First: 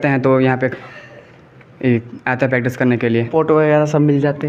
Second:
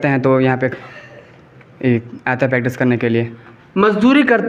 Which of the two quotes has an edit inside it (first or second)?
first